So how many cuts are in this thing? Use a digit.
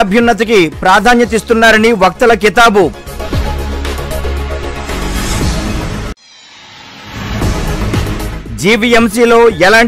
0